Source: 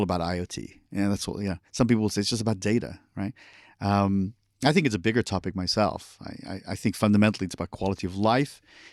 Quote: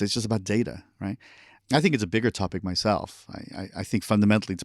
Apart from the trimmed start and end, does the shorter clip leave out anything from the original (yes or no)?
yes